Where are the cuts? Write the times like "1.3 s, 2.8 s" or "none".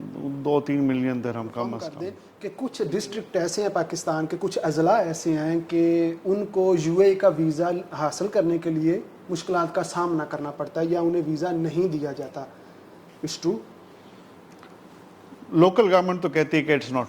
1.9 s